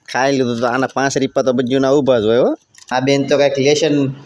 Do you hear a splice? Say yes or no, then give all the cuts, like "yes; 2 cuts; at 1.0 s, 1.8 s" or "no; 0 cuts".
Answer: yes; 1 cut; at 2.8 s